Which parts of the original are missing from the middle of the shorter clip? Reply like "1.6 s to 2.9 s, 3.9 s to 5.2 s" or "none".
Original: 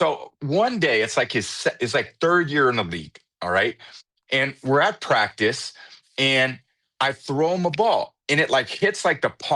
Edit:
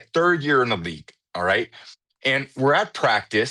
none